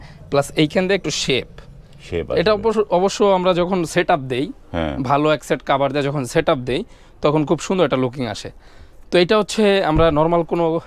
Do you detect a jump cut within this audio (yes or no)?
no